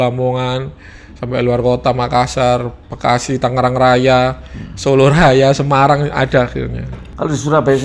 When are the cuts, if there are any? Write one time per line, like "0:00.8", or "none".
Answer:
none